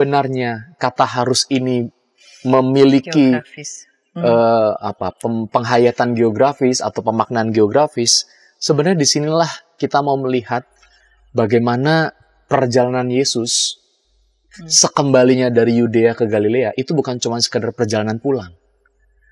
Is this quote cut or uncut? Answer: uncut